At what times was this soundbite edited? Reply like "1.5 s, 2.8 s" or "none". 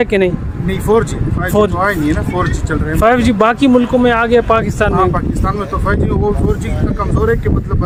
none